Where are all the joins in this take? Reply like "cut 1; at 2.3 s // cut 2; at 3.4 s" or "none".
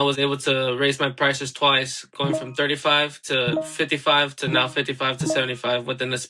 none